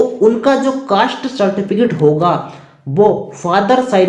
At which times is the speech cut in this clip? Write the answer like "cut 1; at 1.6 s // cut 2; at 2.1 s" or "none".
none